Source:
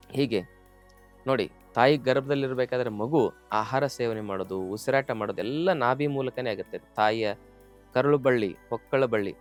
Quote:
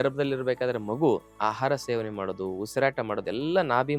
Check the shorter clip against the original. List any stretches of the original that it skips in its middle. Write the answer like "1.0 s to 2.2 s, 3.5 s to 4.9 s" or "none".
none